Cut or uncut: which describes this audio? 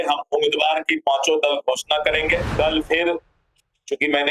cut